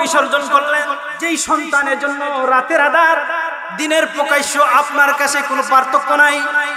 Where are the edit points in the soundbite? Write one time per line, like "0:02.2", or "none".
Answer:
0:01.1